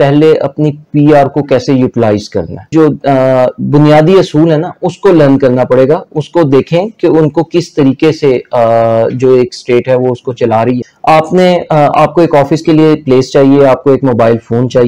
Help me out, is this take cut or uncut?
cut